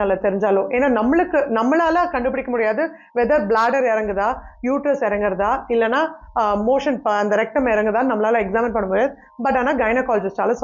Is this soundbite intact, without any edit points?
yes; 0 cuts

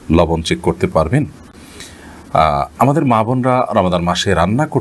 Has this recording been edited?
no; 0 cuts

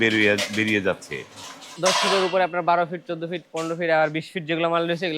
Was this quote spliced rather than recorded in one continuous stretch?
yes; 1 cut; at 1.7 s

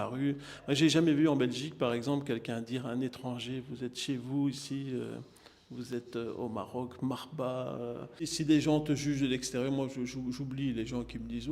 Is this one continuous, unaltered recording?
no; 1 cut; at 8.2 s

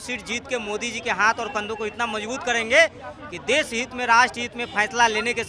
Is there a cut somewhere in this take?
no; 0 cuts

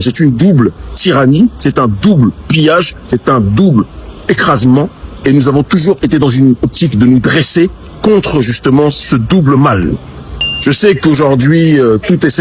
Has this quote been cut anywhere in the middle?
no; 0 cuts

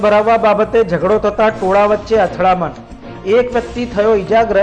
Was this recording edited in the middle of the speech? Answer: no; 0 cuts

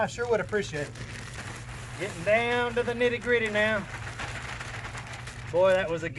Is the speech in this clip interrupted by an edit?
yes; 1 cut; at 1.4 s

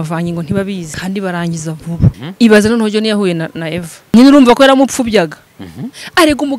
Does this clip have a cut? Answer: yes; 3 cuts; at 0.9 s, 2.2 s, 4.1 s

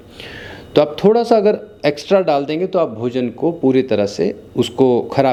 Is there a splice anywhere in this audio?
no; 0 cuts

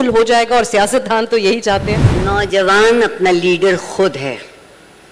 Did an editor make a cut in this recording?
yes; 1 cut; at 2.1 s

